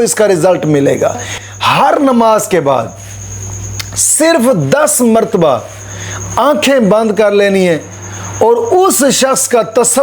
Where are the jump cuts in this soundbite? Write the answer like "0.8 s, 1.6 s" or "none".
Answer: 1.3 s